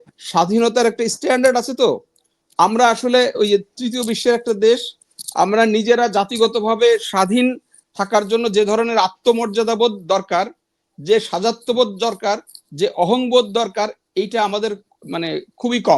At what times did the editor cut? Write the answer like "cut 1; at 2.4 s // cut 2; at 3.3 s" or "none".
none